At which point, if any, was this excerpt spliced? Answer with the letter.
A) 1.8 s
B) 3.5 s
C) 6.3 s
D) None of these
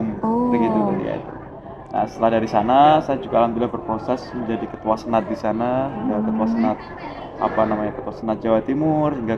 D